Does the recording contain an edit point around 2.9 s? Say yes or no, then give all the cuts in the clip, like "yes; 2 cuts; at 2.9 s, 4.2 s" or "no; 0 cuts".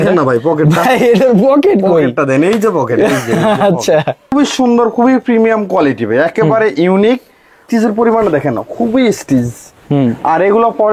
no; 2 cuts; at 4.3 s, 7.6 s